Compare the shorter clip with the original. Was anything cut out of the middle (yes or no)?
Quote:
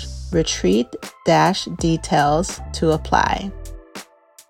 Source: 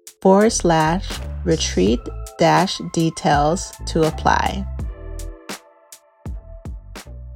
yes